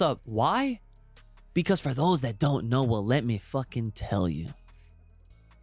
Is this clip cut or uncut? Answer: uncut